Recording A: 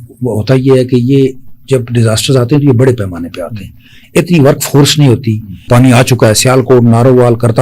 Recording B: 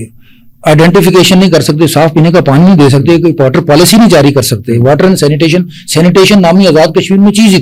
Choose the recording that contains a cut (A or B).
A